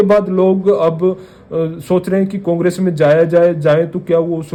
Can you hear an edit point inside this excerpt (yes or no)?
no